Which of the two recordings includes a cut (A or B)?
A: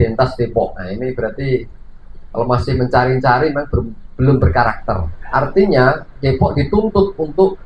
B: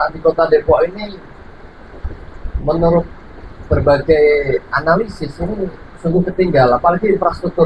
A